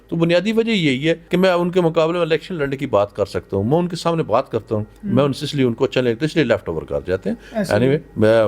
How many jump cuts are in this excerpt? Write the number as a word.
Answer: one